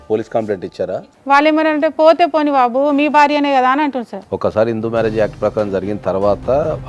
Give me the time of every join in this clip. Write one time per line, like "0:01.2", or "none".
0:00.9
0:04.2